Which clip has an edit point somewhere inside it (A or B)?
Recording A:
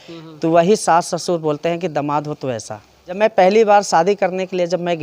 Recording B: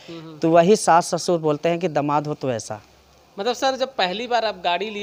A